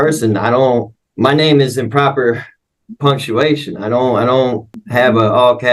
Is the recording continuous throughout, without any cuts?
no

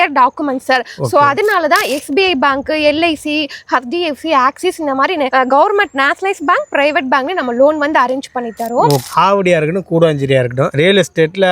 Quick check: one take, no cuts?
no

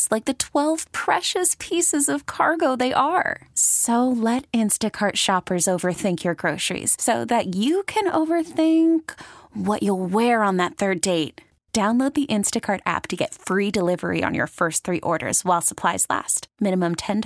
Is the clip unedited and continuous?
yes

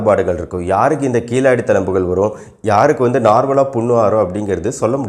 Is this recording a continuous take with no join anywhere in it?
yes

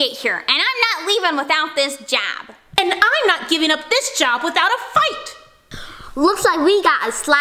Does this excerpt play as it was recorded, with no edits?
yes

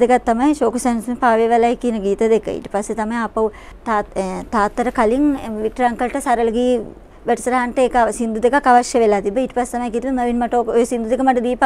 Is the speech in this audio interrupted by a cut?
no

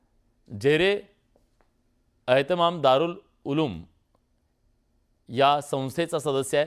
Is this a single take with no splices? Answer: no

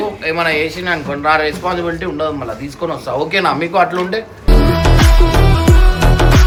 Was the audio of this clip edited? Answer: no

